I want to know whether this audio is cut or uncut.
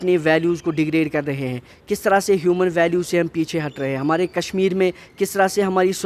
uncut